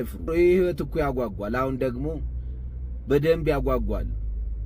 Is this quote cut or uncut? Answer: uncut